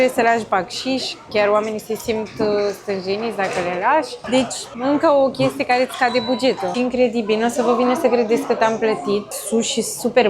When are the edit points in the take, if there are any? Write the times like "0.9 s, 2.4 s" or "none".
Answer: 4.5 s, 6.7 s, 9.4 s

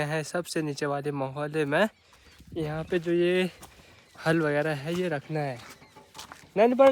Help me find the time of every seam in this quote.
none

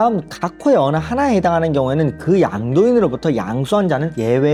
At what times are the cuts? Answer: none

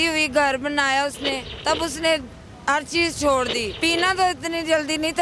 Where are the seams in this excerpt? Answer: 1.5 s, 3.7 s

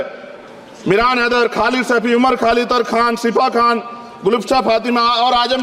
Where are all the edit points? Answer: none

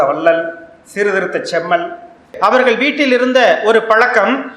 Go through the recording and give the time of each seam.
2.3 s

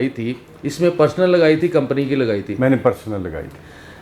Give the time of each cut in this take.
none

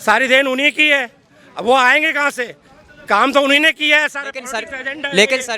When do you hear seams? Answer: none

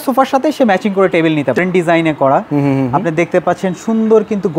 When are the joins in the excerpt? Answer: 1.6 s

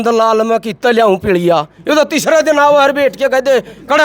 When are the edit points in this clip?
none

